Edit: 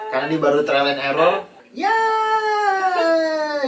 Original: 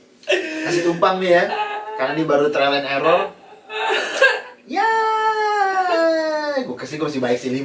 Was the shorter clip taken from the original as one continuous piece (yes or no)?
no